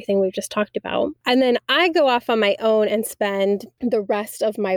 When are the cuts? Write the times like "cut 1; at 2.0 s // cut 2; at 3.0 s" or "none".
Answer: cut 1; at 1.2 s // cut 2; at 3.7 s